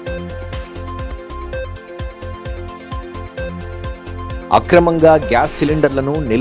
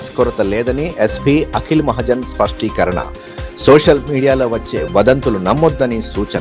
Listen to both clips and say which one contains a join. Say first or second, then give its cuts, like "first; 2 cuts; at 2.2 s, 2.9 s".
first; 1 cut; at 1.0 s